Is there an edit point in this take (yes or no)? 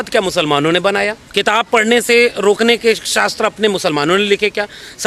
yes